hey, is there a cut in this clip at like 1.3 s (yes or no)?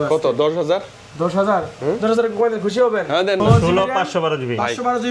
no